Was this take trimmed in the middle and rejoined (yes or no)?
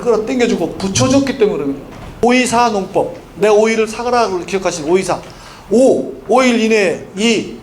yes